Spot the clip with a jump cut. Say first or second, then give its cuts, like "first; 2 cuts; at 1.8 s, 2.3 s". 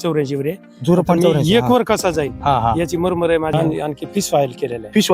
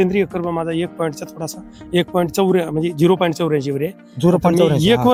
first; 1 cut; at 3.5 s